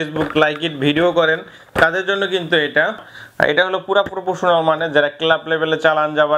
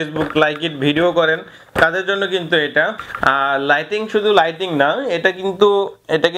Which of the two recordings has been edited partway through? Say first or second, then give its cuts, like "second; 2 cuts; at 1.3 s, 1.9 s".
first; 1 cut; at 3.1 s